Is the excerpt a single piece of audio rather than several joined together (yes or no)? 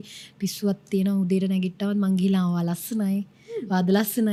yes